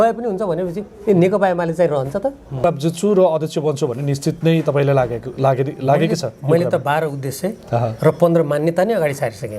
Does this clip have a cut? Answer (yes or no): yes